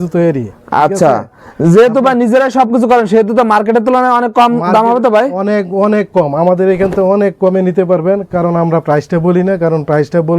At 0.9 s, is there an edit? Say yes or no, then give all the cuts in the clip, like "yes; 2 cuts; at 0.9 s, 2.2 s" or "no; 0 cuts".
no; 0 cuts